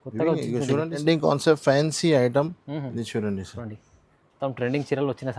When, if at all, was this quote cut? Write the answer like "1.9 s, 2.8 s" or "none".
1.0 s